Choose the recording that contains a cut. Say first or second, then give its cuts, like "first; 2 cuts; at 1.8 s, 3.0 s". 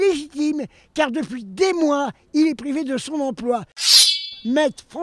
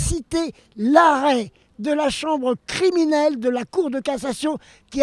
first; 1 cut; at 4.0 s